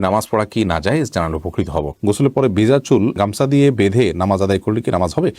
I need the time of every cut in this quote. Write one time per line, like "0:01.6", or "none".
0:02.0